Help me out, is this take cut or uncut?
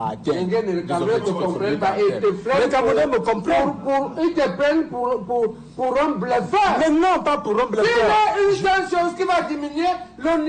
uncut